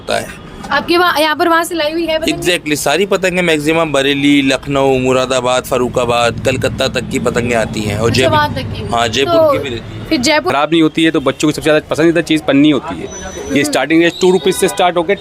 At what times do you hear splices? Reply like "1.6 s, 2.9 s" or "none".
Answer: 10.5 s